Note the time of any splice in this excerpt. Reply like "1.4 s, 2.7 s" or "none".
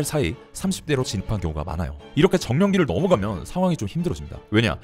none